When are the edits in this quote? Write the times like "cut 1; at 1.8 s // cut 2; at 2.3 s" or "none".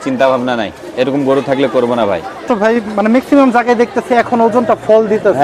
cut 1; at 2.4 s